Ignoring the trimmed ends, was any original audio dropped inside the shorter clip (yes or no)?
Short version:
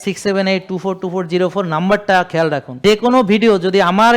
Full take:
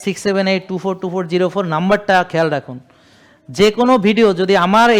yes